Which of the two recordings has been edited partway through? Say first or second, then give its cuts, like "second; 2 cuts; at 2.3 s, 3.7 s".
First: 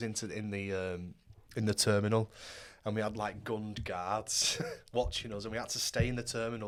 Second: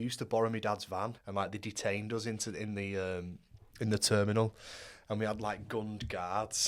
second; 1 cut; at 1.2 s